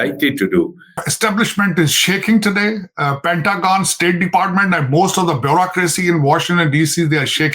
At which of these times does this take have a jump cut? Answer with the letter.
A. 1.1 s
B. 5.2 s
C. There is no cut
A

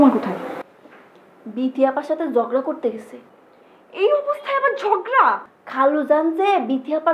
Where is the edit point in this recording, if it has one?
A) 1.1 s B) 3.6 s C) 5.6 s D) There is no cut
C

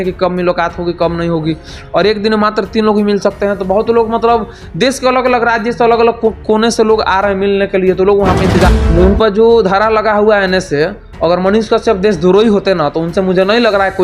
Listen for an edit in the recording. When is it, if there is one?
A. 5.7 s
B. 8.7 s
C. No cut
B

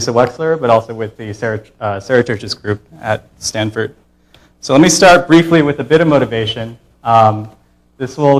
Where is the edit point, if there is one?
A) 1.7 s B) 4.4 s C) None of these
B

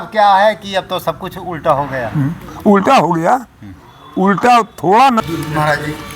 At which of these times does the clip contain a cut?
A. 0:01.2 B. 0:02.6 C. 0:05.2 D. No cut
C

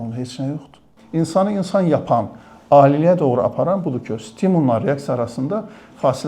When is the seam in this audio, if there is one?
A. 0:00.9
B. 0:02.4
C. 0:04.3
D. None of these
A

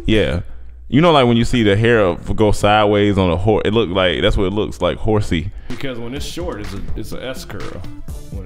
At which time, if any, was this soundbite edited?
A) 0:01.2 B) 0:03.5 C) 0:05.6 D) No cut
C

